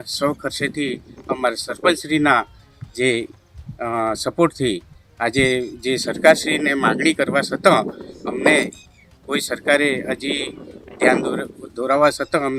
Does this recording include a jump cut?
no; 0 cuts

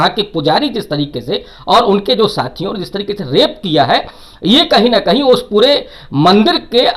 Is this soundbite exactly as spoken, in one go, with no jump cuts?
yes; 0 cuts

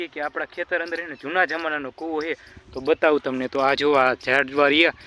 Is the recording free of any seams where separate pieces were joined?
yes; 0 cuts

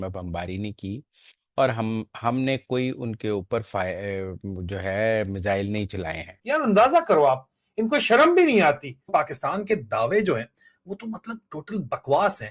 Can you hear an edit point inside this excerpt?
no; 0 cuts

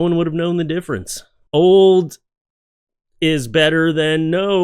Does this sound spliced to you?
yes; 1 cut; at 1.3 s

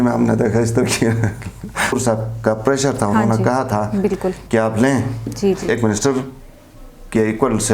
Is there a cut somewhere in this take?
yes; 2 cuts; at 2.0 s, 5.7 s

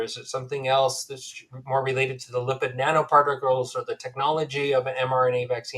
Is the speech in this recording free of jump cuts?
yes; 0 cuts

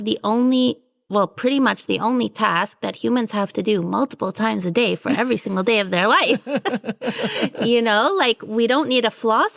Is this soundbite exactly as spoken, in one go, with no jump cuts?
yes; 0 cuts

